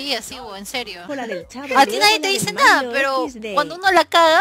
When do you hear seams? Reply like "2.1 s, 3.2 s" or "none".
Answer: 1.0 s